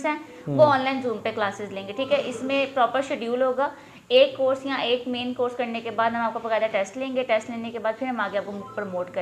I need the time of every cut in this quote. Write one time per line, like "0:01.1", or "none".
none